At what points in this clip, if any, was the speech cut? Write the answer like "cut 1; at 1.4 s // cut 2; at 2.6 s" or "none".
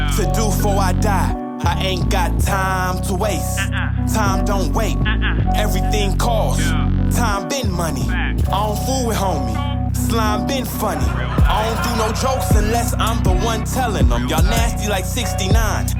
none